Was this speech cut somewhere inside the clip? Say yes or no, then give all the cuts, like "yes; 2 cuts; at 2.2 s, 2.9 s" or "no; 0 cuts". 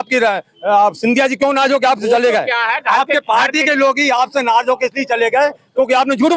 no; 0 cuts